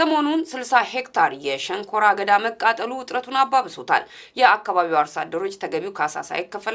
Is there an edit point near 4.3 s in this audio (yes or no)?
yes